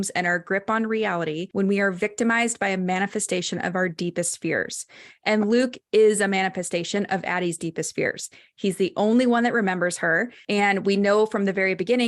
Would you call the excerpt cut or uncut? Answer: cut